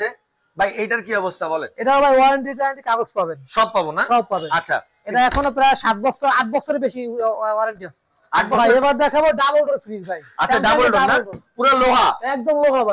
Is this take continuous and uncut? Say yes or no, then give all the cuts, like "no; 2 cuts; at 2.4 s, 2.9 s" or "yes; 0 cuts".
no; 1 cut; at 8.6 s